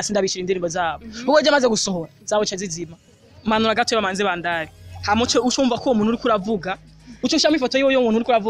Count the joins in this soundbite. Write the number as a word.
one